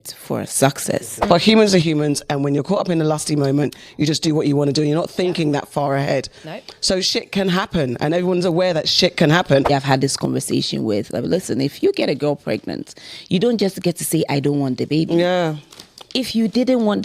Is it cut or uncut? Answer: cut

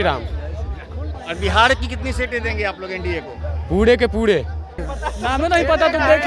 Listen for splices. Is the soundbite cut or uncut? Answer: cut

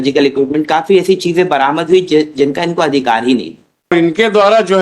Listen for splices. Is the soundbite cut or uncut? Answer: cut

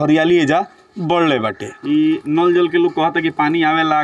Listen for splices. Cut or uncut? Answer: cut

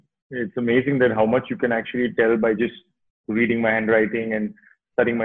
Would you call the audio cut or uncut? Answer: uncut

